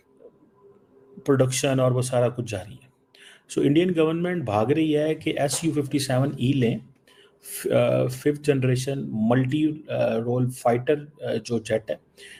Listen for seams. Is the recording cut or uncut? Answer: uncut